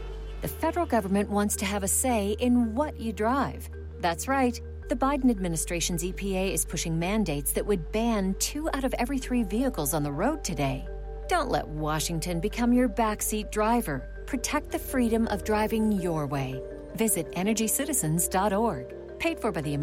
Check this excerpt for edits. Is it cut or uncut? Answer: uncut